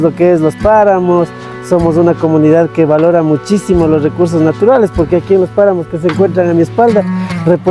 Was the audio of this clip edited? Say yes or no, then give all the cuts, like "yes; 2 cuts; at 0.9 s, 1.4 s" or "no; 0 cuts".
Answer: no; 0 cuts